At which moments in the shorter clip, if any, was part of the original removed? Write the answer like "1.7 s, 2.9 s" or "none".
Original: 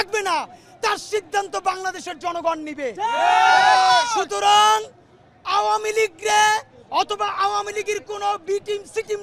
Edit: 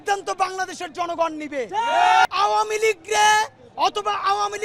2.2 s